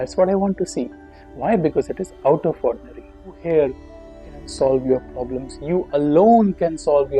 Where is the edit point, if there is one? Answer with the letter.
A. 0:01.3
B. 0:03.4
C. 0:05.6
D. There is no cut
B